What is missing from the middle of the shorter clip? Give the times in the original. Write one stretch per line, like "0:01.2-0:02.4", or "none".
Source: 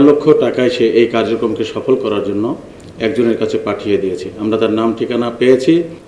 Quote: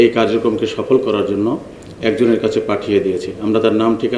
none